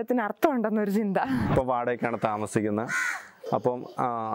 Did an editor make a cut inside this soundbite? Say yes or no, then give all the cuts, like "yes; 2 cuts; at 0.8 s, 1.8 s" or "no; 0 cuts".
yes; 1 cut; at 1.5 s